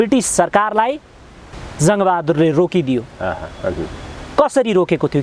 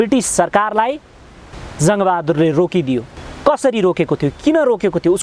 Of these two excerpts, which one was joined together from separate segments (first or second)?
second